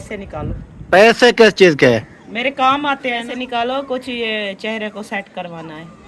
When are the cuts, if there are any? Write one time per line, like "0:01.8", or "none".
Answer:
0:03.3